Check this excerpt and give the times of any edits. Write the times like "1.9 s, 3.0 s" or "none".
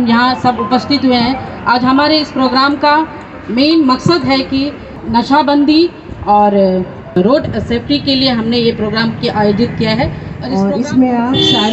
4.9 s, 7.2 s, 10.5 s